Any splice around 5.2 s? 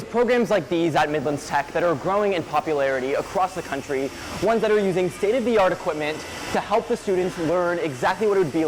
no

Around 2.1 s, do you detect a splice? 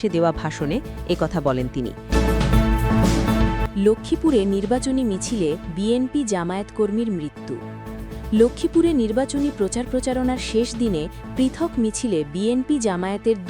yes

